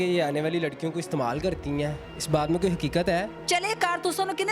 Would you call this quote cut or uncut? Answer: cut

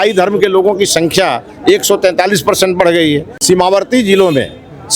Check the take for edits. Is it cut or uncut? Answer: cut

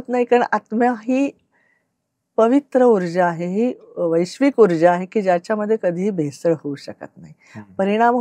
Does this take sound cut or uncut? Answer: uncut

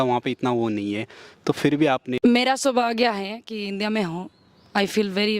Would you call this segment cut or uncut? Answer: cut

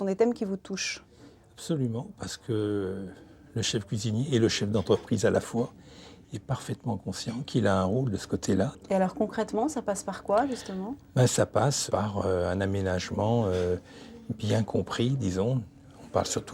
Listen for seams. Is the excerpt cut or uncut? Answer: cut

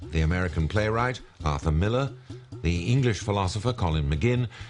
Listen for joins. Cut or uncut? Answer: cut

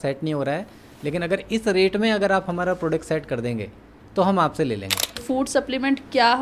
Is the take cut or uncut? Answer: cut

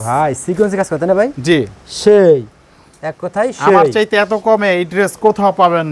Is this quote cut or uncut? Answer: uncut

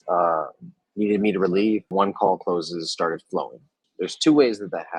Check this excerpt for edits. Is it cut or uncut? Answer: cut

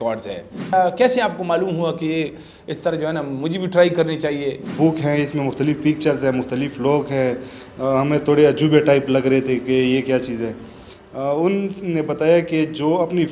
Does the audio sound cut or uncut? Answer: cut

